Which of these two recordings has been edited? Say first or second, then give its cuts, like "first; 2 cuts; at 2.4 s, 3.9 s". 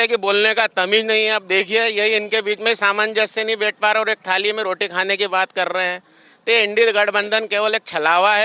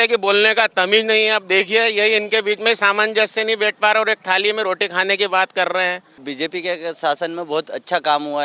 second; 1 cut; at 6.3 s